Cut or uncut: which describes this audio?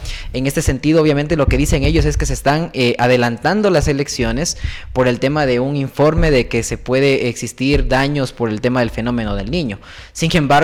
uncut